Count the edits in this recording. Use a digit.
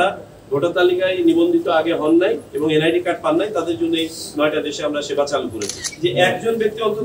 1